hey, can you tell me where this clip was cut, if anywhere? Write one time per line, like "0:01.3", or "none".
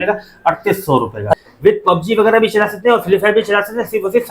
0:01.4